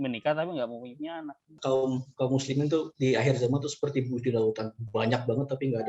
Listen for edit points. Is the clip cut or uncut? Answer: cut